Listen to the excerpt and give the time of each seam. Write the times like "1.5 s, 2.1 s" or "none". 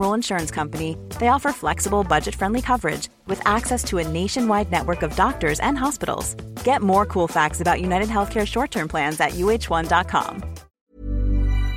10.7 s

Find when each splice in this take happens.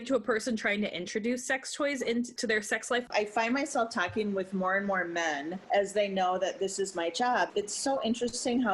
3.0 s, 7.5 s

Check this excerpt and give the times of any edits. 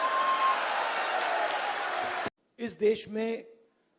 2.3 s

